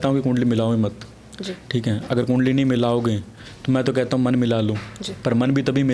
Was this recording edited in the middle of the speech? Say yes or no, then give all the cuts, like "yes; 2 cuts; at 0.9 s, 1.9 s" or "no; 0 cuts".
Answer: no; 0 cuts